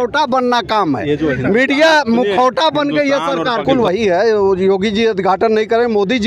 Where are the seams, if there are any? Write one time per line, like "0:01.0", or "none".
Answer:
0:03.6